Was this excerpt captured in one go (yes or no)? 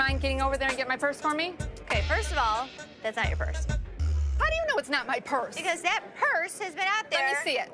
yes